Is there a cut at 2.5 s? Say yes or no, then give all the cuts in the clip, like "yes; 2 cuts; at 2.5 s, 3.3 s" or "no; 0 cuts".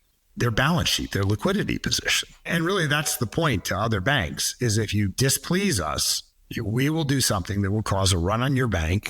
yes; 1 cut; at 2.5 s